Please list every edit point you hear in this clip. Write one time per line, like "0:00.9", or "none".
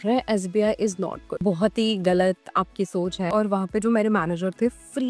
0:03.3